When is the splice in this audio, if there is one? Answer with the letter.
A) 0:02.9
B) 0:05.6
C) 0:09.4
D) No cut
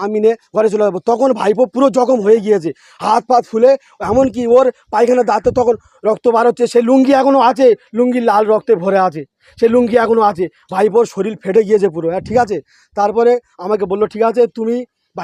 D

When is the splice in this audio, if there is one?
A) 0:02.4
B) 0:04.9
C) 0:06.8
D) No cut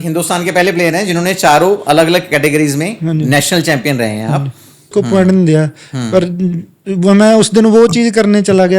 B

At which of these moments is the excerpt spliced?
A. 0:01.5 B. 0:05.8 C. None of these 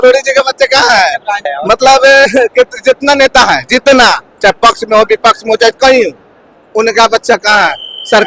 A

